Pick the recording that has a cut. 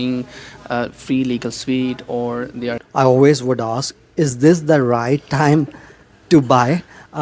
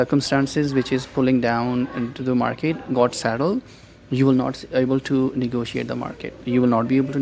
first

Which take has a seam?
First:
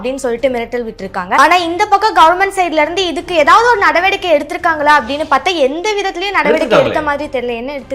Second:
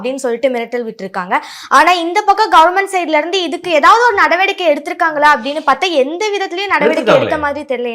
first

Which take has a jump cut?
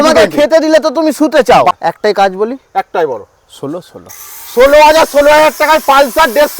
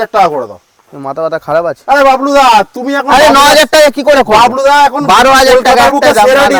first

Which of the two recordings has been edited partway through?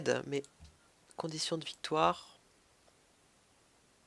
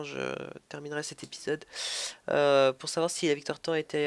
first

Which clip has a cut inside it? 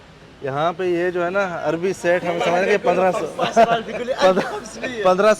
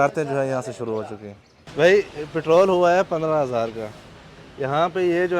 second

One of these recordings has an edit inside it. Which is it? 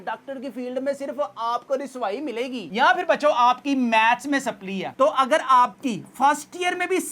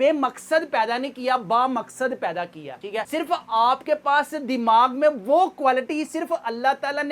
first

